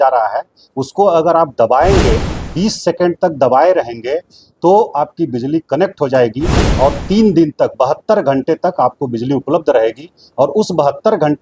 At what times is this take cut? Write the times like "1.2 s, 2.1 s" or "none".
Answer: none